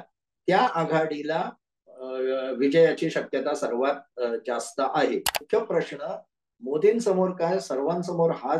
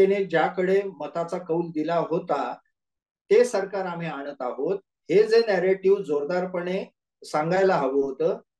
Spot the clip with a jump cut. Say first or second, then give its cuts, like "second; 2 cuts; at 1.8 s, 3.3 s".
first; 1 cut; at 5.4 s